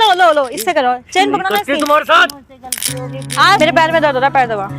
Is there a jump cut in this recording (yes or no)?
yes